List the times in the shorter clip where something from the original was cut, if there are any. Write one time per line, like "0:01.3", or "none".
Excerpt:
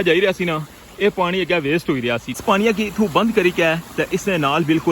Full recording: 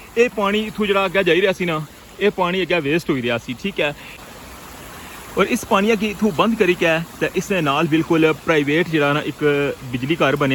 0:02.4